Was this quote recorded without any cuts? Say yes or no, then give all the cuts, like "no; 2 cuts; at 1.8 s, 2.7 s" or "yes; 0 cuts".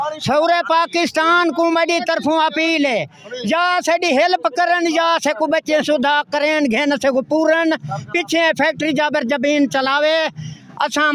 yes; 0 cuts